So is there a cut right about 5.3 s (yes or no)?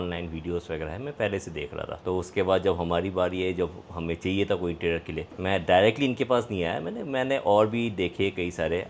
no